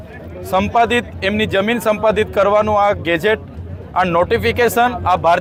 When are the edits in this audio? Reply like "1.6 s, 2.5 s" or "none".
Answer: none